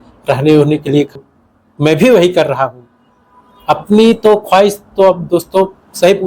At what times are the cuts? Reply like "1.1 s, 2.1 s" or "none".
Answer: 1.2 s